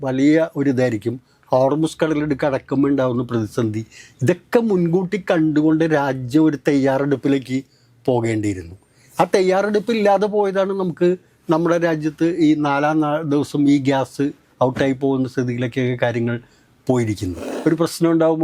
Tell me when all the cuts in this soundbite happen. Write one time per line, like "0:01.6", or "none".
0:17.4

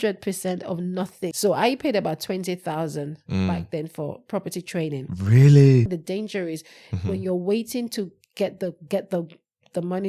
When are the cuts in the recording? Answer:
0:01.3
0:05.9

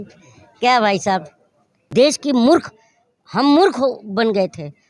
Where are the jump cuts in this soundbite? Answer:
0:01.9

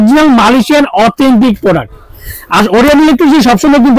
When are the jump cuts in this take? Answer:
none

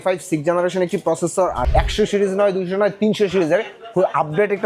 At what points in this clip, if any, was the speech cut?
0:01.6

